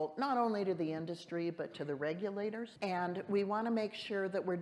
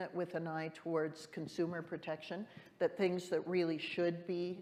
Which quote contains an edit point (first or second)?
first